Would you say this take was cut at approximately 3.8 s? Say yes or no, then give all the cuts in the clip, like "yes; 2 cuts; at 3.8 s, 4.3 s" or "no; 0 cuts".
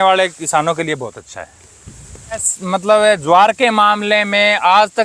no; 1 cut; at 2.5 s